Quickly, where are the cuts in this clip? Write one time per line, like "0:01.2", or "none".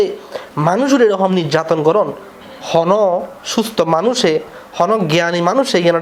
none